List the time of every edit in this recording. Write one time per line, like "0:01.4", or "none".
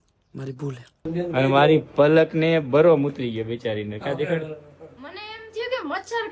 0:01.1

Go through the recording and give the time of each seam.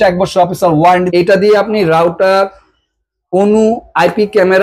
0:01.1

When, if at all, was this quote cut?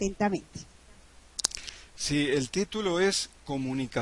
none

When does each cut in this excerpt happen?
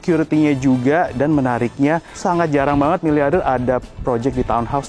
0:02.1

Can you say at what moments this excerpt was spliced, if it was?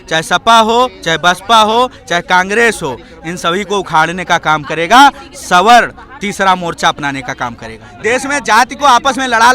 0:07.9

